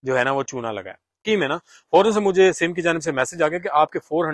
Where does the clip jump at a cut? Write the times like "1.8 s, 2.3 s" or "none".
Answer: 1.2 s